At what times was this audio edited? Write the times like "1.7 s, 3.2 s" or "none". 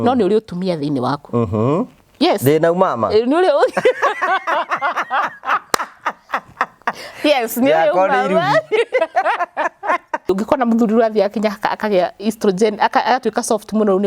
10.3 s